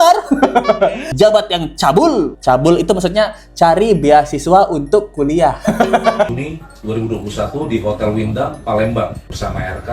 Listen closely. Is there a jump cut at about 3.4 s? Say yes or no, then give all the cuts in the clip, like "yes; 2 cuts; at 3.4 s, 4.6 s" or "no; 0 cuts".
no; 2 cuts; at 1.0 s, 6.3 s